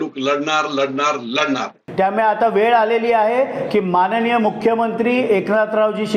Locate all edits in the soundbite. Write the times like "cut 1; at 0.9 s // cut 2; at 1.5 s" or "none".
cut 1; at 1.8 s